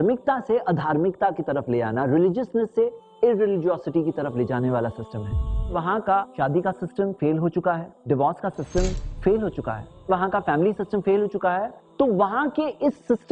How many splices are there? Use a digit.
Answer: 1